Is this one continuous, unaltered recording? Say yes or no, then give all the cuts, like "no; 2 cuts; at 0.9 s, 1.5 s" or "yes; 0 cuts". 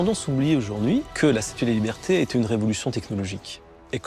no; 1 cut; at 1.1 s